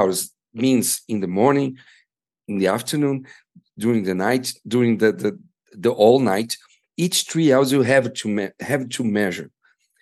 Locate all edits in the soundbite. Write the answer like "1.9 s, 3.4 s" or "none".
none